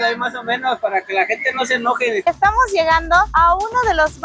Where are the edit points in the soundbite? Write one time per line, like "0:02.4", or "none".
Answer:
0:02.2